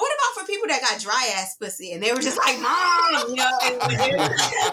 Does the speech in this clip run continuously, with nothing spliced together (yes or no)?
yes